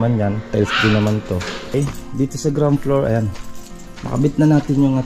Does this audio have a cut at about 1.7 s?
yes; 1 cut; at 1.7 s

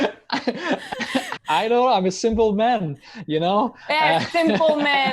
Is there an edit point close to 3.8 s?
no; 1 cut; at 1.3 s

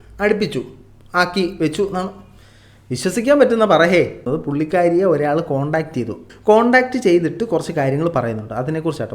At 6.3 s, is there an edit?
yes; 2 cuts; at 4.2 s, 6.3 s

